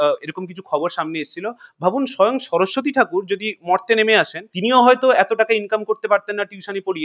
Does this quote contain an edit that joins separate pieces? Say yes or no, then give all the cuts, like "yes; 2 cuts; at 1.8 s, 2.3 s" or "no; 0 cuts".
yes; 1 cut; at 4.4 s